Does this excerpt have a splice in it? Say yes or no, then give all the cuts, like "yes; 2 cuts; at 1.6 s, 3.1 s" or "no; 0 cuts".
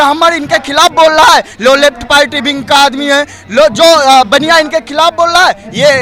no; 0 cuts